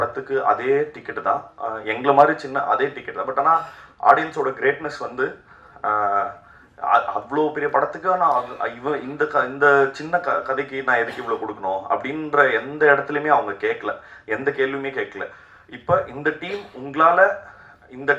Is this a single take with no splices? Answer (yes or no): yes